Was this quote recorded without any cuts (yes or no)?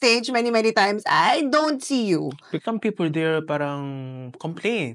no